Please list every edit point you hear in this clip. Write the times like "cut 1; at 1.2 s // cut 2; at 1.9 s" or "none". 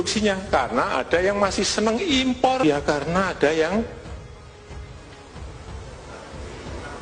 cut 1; at 2.6 s